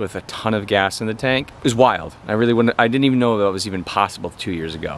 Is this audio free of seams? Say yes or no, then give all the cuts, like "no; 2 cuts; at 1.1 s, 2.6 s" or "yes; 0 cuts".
no; 1 cut; at 1.5 s